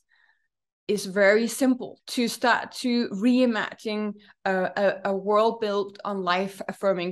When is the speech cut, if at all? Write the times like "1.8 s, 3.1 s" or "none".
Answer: 2.0 s